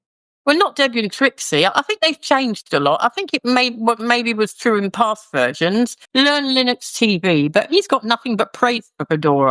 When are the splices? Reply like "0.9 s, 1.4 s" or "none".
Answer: 6.0 s